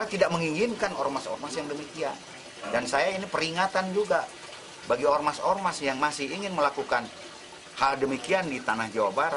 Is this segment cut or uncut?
uncut